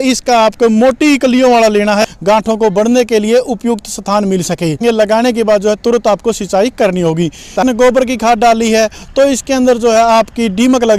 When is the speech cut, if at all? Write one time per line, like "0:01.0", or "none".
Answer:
0:02.0
0:04.8
0:07.5